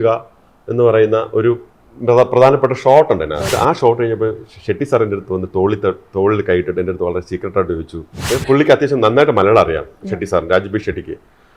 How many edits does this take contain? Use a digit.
2